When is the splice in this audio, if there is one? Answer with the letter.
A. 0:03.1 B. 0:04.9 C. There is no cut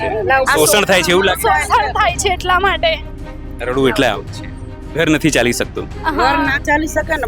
C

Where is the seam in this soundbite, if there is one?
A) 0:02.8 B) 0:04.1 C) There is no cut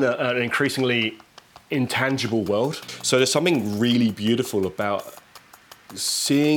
A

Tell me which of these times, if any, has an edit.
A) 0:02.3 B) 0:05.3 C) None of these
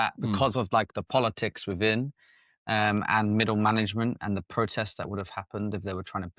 C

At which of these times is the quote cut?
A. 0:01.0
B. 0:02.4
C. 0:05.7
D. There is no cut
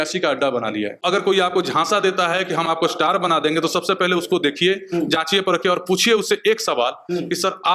A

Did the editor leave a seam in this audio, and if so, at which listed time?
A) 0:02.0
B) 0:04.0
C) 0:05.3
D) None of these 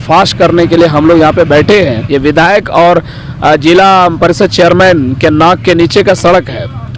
A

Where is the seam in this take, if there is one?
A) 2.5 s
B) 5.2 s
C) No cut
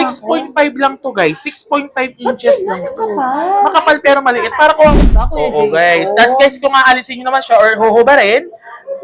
B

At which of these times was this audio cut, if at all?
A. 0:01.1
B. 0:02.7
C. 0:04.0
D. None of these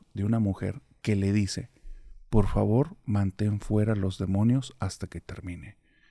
D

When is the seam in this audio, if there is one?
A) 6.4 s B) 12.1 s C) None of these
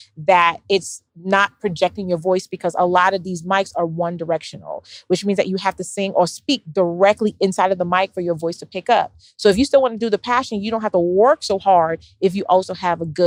C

